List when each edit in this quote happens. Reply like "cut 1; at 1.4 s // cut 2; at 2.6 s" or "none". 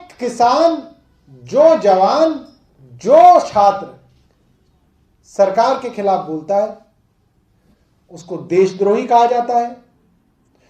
none

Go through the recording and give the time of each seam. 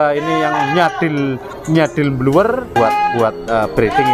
cut 1; at 2.8 s

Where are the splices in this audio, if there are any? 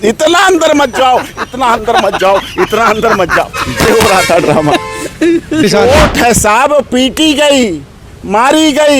cut 1; at 5.6 s

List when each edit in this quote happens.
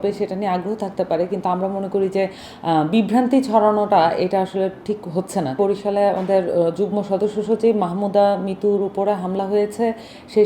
cut 1; at 5.6 s

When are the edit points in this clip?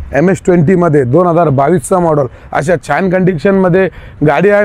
none

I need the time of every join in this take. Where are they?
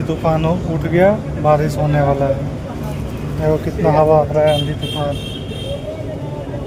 none

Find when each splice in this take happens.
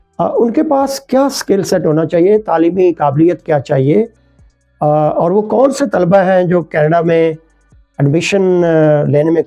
none

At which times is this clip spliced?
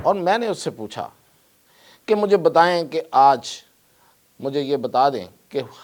none

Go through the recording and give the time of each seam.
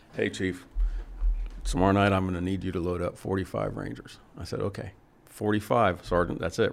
none

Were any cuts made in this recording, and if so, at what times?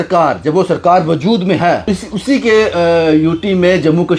cut 1; at 1.9 s

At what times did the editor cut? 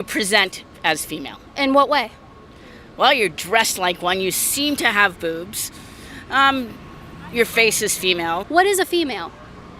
cut 1; at 8.4 s

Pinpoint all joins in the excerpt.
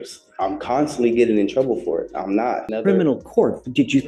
cut 1; at 2.7 s

